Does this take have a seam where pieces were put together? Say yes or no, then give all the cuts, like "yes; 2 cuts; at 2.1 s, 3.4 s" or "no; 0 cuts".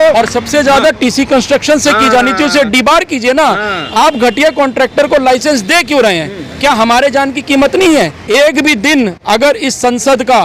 yes; 1 cut; at 8.2 s